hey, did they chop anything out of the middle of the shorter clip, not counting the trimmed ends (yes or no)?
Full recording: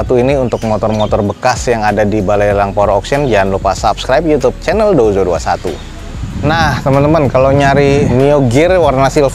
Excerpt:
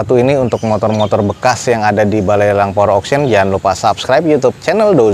no